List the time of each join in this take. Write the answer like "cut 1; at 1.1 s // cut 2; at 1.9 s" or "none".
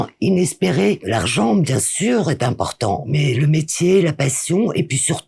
cut 1; at 3.1 s